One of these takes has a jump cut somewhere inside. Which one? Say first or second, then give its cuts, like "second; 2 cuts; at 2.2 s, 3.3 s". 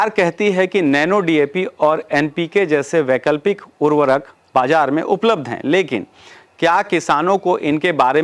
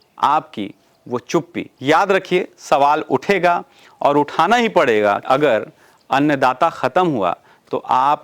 second; 2 cuts; at 1.6 s, 5.2 s